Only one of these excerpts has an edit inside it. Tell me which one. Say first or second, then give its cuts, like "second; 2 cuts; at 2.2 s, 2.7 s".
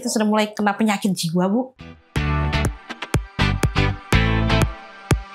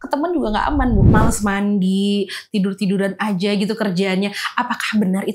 second; 1 cut; at 1.1 s